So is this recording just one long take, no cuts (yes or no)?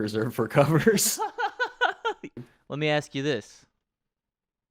no